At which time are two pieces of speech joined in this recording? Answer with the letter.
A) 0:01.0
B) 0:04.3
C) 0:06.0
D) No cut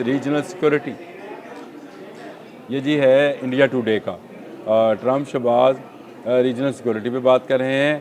D